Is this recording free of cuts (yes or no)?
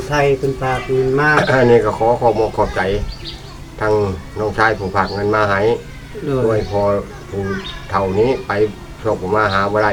yes